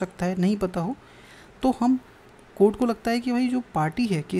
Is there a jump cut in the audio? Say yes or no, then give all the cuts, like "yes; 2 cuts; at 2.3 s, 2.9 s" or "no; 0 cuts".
no; 0 cuts